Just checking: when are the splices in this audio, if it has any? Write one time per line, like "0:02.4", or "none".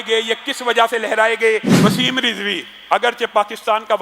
0:01.7